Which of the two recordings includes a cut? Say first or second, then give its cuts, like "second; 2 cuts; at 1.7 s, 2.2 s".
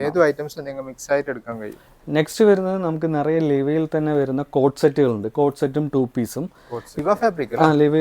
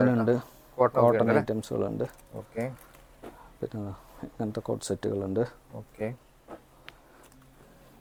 first; 2 cuts; at 1.9 s, 6.9 s